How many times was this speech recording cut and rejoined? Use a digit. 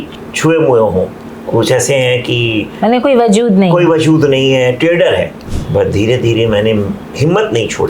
2